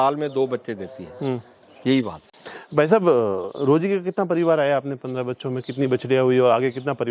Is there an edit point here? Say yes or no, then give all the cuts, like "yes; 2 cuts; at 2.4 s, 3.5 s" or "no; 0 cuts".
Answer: no; 0 cuts